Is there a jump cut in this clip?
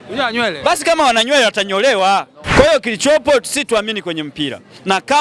yes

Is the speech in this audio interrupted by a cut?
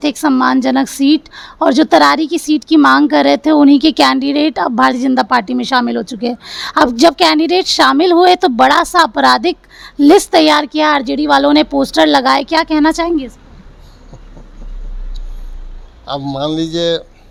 no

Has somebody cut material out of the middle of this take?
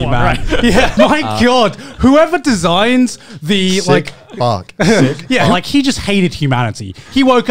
yes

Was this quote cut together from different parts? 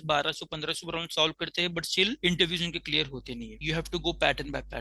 yes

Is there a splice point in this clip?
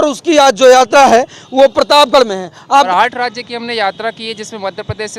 yes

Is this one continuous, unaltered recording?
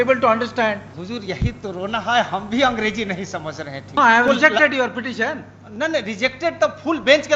no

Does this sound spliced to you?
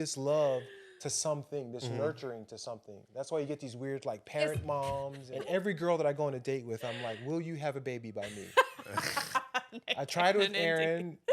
yes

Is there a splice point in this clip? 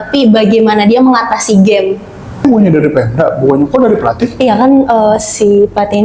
yes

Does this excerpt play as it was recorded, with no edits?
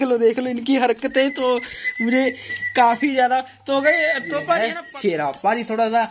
no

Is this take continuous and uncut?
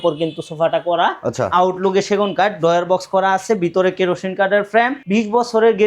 no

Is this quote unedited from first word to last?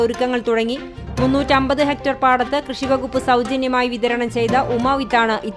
yes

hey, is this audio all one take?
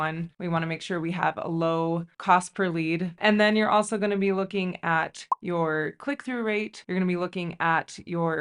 no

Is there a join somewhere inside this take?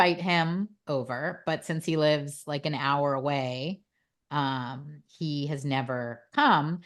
no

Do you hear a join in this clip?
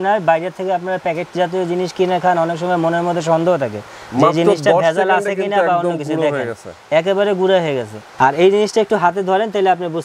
yes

